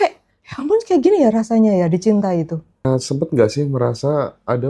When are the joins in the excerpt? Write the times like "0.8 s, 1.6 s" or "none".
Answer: 2.8 s